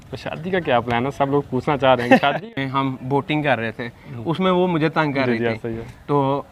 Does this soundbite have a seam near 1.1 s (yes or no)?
no